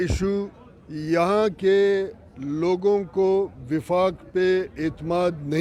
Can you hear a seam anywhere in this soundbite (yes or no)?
no